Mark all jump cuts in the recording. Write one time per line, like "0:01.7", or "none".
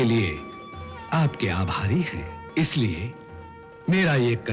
0:02.4